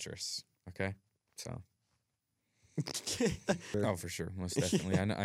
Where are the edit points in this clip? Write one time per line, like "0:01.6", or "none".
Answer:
0:03.7